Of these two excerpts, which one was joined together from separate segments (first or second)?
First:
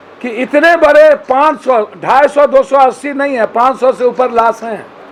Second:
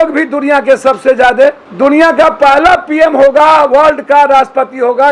second